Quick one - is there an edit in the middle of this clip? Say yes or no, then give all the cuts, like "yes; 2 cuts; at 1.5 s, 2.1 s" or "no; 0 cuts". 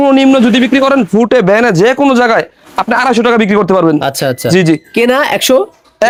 no; 0 cuts